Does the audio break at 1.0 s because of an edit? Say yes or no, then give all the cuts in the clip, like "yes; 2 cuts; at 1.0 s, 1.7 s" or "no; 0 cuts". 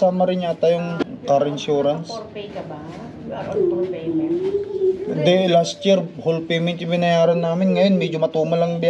yes; 1 cut; at 1.0 s